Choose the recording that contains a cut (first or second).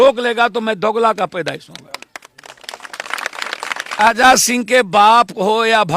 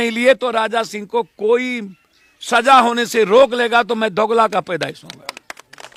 first